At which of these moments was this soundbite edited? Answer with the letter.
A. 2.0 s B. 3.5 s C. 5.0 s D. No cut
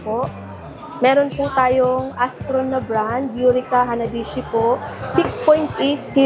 C